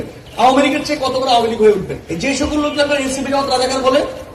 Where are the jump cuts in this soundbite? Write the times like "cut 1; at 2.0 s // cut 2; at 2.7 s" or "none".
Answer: cut 1; at 2.0 s